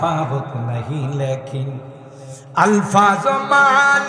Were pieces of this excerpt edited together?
no; 0 cuts

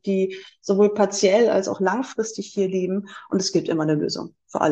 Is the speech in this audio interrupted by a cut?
no; 0 cuts

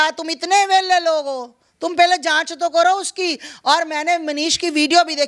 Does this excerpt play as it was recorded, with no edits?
yes; 0 cuts

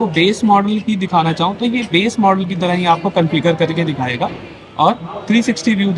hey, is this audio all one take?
yes; 0 cuts

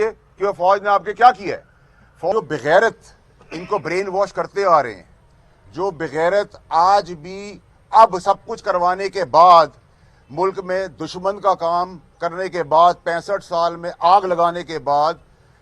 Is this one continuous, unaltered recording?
no; 1 cut; at 2.3 s

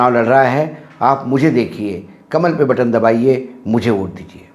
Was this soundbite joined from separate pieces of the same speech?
no; 0 cuts

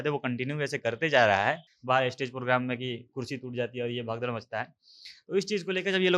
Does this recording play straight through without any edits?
no; 1 cut; at 1.7 s

